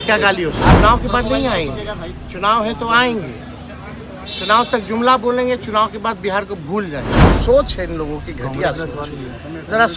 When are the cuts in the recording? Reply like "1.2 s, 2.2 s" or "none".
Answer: 0.8 s, 7.2 s